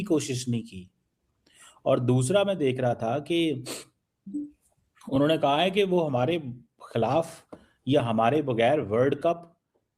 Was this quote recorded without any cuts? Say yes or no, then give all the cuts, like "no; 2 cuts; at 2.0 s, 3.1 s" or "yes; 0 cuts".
yes; 0 cuts